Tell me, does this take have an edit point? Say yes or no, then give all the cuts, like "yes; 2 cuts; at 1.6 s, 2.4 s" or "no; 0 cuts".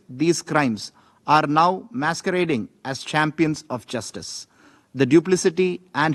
no; 0 cuts